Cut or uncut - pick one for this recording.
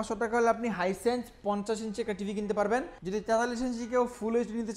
cut